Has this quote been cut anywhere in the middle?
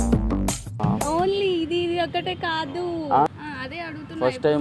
yes; 1 cut; at 3.3 s

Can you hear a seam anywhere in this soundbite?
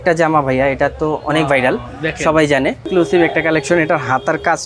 no; 0 cuts

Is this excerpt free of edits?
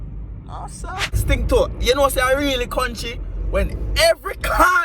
no; 1 cut; at 1.0 s

